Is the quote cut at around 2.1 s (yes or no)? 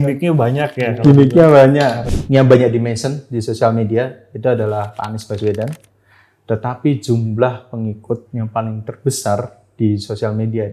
yes